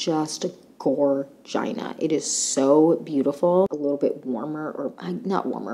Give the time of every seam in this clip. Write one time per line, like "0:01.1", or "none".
0:03.7